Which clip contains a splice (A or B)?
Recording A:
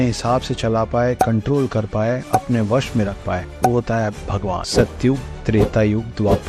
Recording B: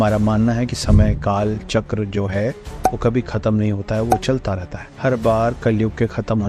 A